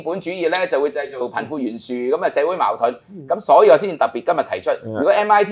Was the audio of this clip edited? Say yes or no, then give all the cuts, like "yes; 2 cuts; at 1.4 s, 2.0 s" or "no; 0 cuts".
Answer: no; 0 cuts